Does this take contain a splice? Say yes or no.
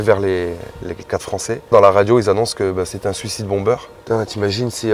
yes